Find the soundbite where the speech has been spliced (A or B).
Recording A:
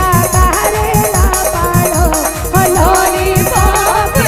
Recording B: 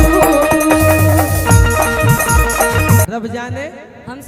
B